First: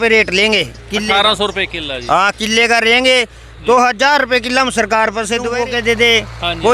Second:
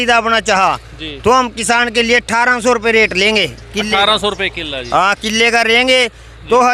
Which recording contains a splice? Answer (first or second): first